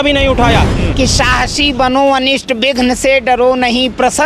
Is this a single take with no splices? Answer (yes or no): no